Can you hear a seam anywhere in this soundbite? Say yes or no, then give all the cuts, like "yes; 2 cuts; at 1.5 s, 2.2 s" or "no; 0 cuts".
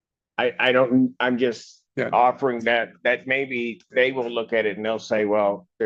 no; 0 cuts